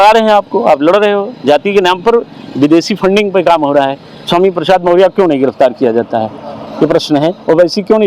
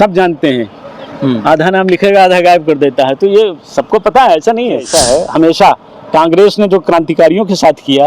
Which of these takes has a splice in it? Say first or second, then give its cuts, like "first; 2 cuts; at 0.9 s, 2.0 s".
second; 1 cut; at 4.8 s